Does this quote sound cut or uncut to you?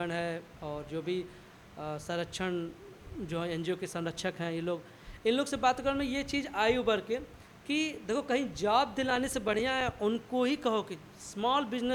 uncut